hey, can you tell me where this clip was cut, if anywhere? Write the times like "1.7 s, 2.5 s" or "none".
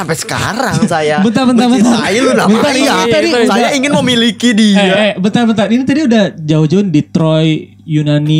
none

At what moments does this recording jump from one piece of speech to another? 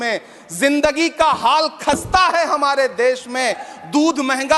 none

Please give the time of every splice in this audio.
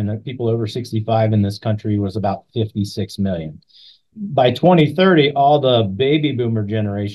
4.1 s

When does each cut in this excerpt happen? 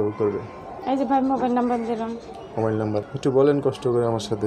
3.1 s

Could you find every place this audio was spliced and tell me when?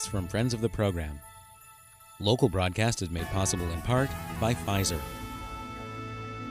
5.0 s

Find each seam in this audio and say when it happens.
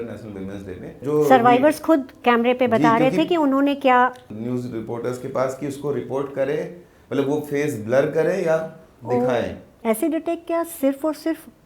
1.0 s, 4.2 s, 9.7 s

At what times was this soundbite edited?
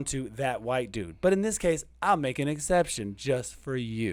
none

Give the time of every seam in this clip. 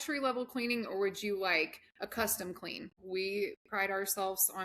3.0 s

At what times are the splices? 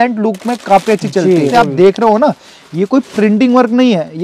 1.5 s

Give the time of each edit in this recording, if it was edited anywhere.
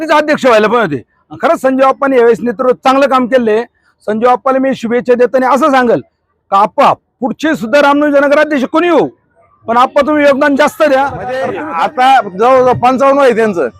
11.5 s

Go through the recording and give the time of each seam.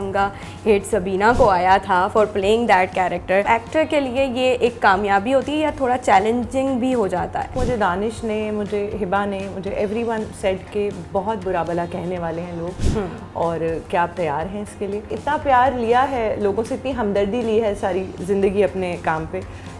3.4 s, 7.6 s, 15.1 s

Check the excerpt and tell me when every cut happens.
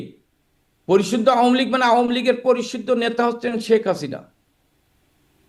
none

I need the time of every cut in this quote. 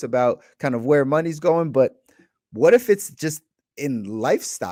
none

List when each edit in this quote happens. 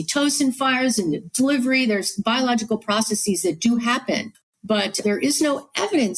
5.0 s

